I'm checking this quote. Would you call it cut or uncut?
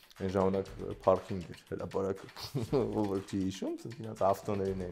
uncut